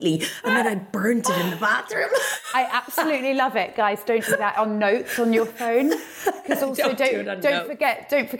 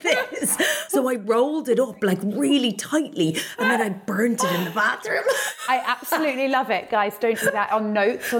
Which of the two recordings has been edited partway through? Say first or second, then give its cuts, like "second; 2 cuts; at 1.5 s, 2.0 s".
second; 1 cut; at 1.0 s